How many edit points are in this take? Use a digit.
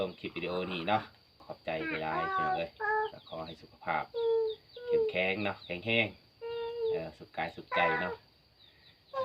1